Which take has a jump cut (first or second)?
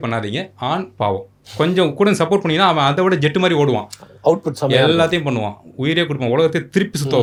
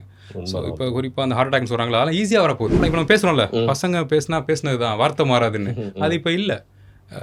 second